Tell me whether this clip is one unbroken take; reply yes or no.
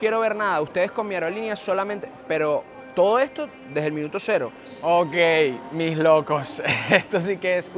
no